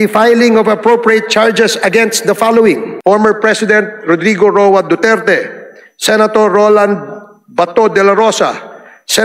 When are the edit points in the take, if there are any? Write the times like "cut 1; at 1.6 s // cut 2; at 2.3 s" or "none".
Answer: cut 1; at 2.9 s